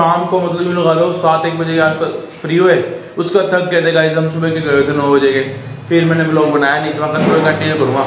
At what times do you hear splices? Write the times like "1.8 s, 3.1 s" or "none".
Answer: none